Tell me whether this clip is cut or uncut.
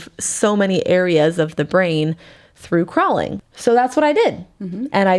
cut